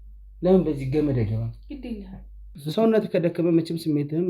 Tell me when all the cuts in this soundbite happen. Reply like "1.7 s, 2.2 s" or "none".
2.5 s